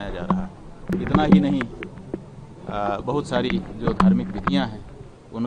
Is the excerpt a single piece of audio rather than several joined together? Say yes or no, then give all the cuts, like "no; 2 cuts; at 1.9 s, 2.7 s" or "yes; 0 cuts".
no; 1 cut; at 0.9 s